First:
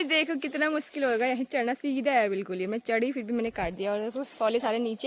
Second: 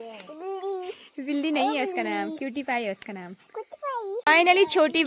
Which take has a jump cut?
second; 1 cut; at 4.1 s

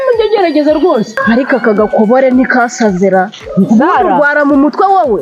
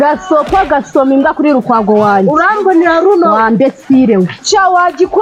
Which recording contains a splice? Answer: first; 1 cut; at 1.1 s

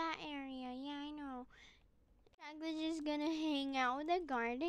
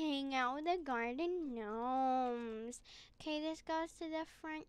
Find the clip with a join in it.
first; 1 cut; at 2.5 s

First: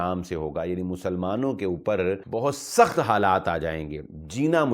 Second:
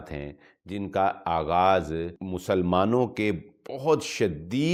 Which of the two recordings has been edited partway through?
first; 1 cut; at 2.2 s

